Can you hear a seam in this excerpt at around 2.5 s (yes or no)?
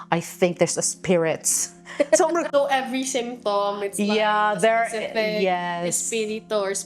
yes